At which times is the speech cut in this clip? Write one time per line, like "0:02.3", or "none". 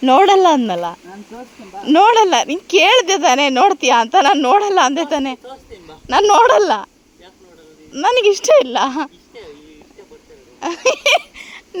none

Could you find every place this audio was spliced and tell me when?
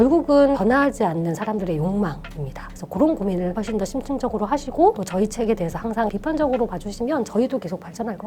0:06.1

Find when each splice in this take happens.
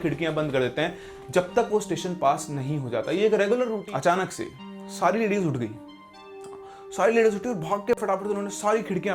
0:03.8

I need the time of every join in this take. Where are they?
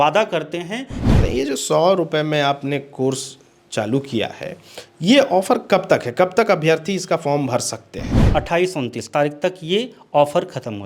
0:01.1
0:08.2

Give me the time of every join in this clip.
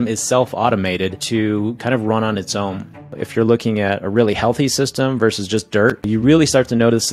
0:01.2
0:03.2
0:06.0

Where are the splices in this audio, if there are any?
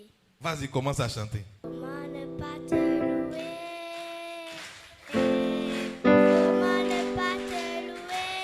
0:01.6

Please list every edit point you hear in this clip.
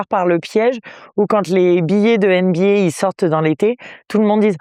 none

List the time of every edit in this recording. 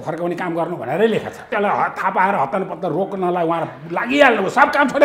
0:01.5

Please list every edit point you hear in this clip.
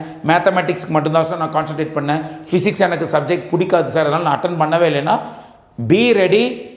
none

